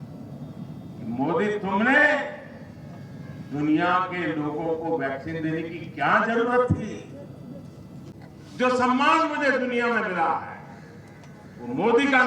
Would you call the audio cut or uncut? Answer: cut